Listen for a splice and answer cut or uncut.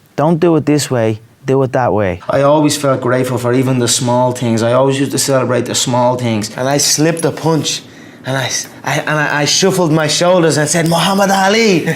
cut